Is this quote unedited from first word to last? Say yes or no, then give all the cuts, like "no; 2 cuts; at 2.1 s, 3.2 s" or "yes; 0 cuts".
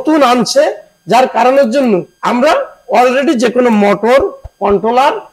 no; 1 cut; at 2.1 s